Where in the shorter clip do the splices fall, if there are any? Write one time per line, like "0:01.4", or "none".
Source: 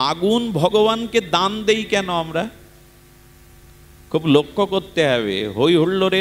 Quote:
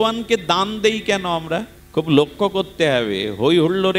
0:01.8